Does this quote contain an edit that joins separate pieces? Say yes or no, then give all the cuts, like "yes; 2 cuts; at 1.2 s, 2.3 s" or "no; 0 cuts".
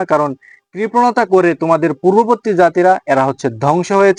no; 0 cuts